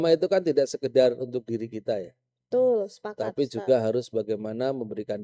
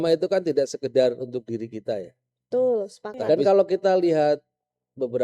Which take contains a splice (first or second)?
second